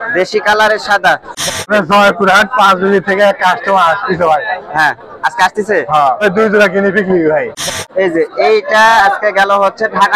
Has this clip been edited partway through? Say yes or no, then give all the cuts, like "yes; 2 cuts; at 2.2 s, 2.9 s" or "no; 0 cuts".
yes; 3 cuts; at 1.5 s, 6.2 s, 7.6 s